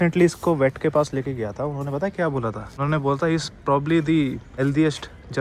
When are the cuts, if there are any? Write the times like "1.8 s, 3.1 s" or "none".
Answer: 2.7 s, 4.5 s